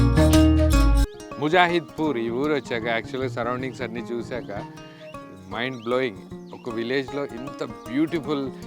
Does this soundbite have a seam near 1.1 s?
yes; 1 cut; at 1.1 s

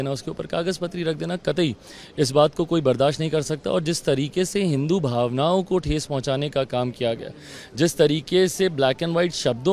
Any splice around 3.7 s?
no; 0 cuts

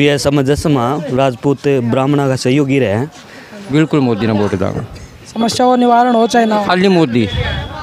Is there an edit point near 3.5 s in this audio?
yes; 1 cut; at 3.5 s

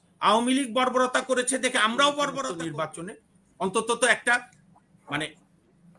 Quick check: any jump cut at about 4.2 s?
no; 1 cut; at 2.5 s

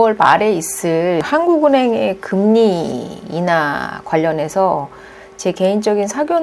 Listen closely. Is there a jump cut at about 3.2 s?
no; 1 cut; at 1.2 s

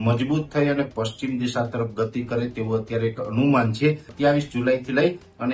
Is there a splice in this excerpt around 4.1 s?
yes; 1 cut; at 4.1 s

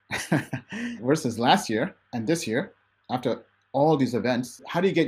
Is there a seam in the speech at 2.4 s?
no; 1 cut; at 1.0 s

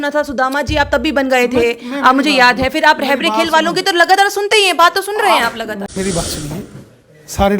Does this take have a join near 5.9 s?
yes; 1 cut; at 5.9 s

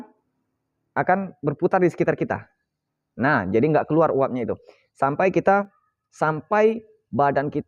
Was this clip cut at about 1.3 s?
no; 1 cut; at 5.8 s

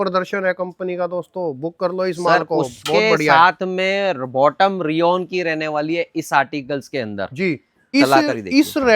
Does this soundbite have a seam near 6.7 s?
no; 1 cut; at 7.9 s

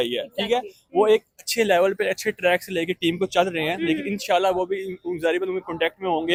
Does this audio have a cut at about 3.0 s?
no; 0 cuts

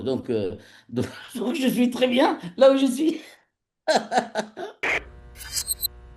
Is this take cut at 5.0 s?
yes; 1 cut; at 5.0 s

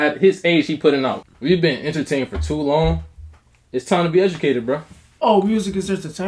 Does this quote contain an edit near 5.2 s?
yes; 2 cuts; at 1.2 s, 5.2 s

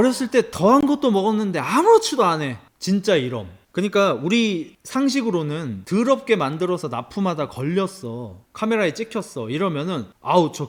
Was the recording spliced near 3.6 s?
no; 0 cuts

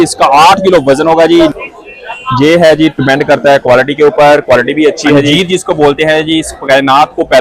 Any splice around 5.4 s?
yes; 2 cuts; at 1.5 s, 5.4 s

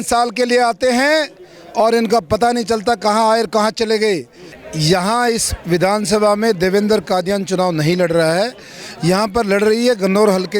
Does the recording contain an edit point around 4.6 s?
yes; 1 cut; at 4.6 s

